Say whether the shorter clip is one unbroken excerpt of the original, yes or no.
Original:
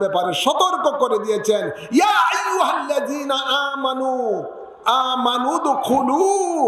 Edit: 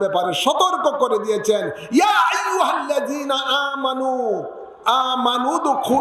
yes